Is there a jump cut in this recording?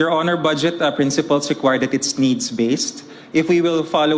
no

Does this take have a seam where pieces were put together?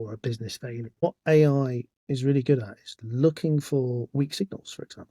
yes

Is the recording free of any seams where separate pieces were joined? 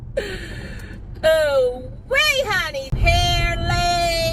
no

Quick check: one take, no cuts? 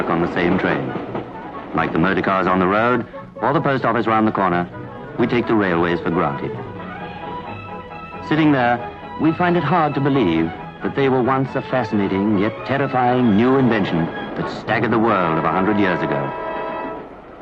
no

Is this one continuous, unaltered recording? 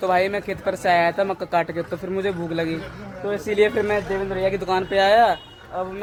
yes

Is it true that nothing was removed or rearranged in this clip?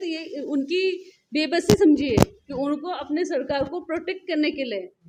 yes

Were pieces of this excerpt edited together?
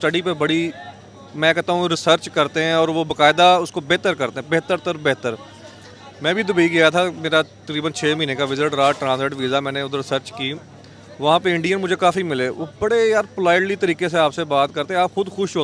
no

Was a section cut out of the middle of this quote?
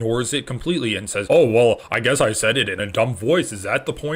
no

